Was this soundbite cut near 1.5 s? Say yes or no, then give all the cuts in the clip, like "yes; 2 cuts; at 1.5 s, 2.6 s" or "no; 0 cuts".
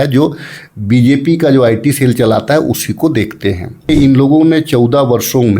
no; 1 cut; at 3.9 s